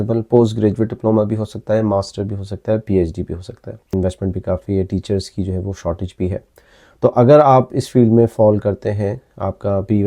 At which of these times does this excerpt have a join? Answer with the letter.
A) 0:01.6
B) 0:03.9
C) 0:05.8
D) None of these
B